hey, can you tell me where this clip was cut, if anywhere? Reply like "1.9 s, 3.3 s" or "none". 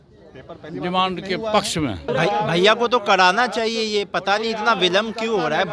2.1 s